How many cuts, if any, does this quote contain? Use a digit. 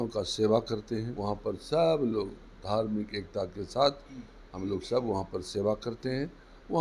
1